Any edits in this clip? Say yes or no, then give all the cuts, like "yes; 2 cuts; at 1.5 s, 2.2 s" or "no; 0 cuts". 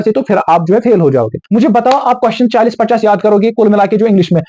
yes; 1 cut; at 1.4 s